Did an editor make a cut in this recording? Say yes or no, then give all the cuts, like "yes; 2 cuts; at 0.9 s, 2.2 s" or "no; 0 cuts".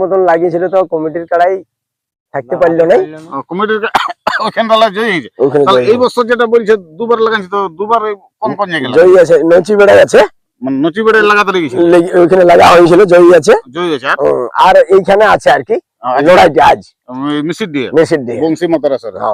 no; 0 cuts